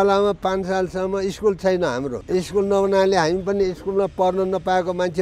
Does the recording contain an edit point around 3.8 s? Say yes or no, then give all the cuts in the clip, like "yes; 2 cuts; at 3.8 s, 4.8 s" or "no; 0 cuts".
no; 1 cut; at 2.2 s